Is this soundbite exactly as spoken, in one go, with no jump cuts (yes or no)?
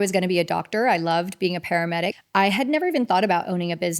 no